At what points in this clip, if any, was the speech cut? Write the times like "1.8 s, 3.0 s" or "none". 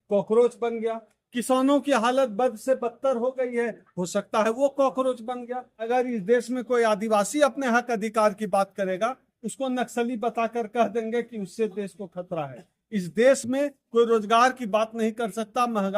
5.8 s